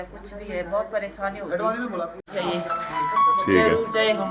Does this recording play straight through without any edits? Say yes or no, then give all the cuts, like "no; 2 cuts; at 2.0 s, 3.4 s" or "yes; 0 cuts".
yes; 0 cuts